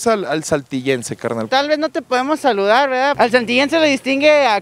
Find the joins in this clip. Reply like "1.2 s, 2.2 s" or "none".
3.1 s